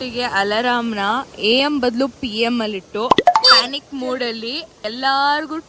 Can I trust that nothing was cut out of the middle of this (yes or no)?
no